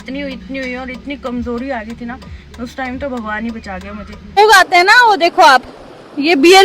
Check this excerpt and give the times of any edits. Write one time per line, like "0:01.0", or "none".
0:04.4